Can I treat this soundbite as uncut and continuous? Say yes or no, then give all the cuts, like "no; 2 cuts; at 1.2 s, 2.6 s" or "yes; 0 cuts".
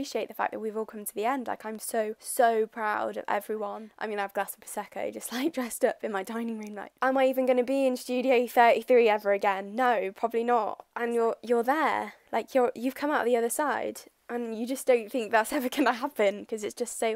no; 3 cuts; at 4.0 s, 6.9 s, 10.9 s